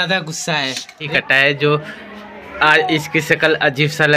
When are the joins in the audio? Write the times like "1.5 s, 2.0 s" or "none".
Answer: 1.1 s